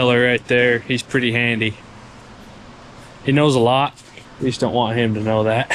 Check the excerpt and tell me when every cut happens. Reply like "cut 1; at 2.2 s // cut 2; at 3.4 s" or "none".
none